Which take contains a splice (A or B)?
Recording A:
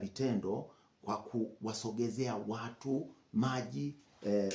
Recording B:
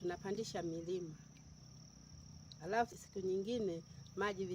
B